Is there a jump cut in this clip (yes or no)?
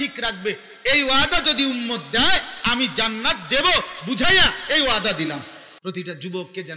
yes